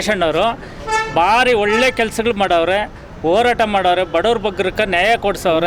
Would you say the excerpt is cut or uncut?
uncut